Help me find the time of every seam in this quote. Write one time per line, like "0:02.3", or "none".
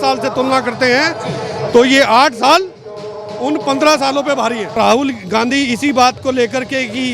0:04.7

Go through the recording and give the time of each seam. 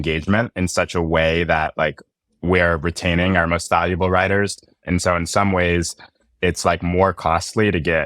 0:04.7

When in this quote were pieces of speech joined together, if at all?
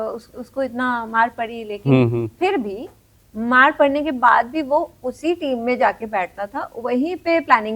none

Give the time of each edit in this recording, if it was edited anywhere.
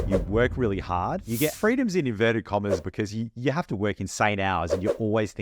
0:01.5
0:02.8

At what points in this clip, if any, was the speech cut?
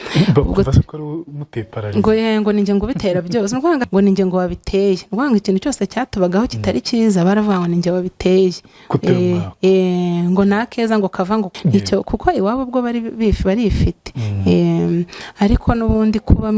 0:03.9
0:11.5

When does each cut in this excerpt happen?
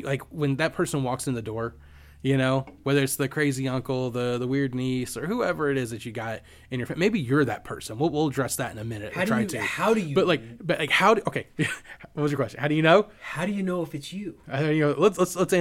none

